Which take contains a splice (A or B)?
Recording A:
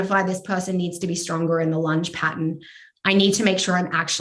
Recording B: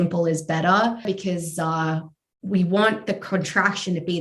B